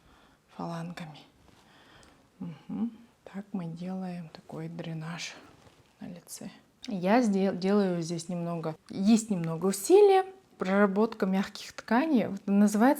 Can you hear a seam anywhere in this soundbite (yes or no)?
yes